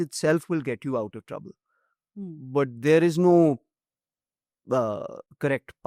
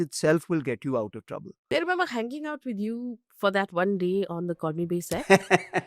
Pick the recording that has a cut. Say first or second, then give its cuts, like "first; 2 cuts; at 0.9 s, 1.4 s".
second; 1 cut; at 1.7 s